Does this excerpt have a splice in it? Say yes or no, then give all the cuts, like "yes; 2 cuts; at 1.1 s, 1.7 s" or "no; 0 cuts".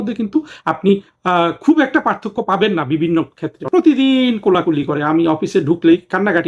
yes; 1 cut; at 3.6 s